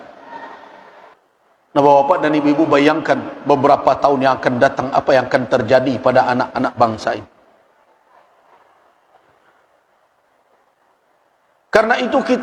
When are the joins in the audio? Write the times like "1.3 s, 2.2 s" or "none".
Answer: 1.2 s